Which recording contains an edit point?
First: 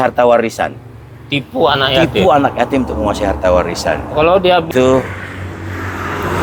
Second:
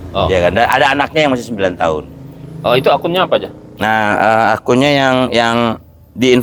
first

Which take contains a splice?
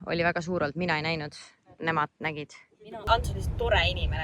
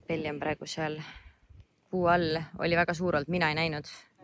first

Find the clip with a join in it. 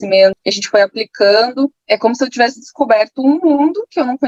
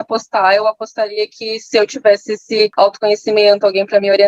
second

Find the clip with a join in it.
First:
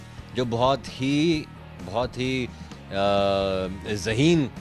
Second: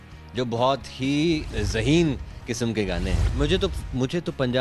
second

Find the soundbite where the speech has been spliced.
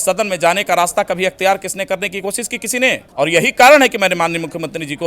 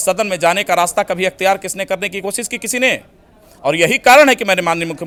first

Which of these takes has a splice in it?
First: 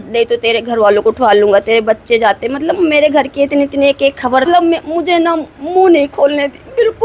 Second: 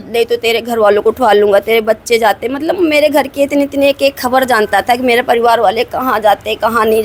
first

